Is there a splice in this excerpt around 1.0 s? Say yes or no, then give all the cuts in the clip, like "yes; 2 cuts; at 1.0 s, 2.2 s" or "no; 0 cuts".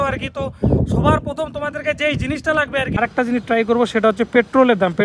no; 1 cut; at 3.0 s